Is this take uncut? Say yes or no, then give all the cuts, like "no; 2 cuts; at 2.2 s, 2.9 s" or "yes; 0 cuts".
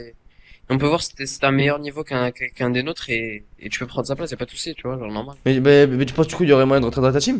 no; 1 cut; at 5.3 s